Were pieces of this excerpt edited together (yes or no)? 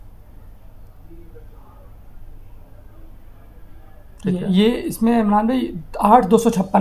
no